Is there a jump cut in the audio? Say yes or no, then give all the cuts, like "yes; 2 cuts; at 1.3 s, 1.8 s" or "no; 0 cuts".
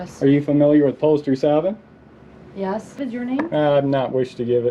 yes; 1 cut; at 3.0 s